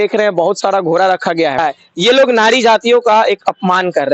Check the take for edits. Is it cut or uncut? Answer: cut